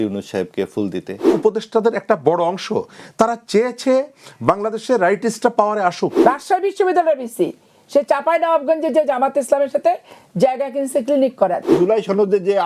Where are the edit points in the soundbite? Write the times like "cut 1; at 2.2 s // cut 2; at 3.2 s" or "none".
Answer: cut 1; at 1.3 s // cut 2; at 6.1 s // cut 3; at 11.7 s